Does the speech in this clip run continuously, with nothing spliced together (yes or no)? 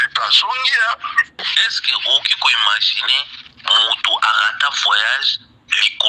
no